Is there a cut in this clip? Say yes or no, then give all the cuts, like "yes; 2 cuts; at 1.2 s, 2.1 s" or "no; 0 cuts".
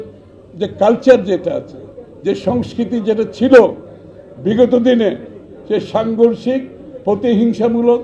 no; 0 cuts